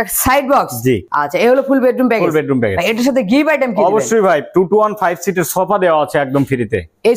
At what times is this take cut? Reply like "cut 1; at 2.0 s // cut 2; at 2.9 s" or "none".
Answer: none